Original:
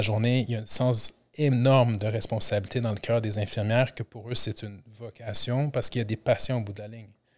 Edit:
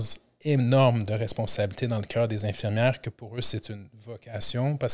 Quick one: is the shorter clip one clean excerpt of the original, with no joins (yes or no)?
yes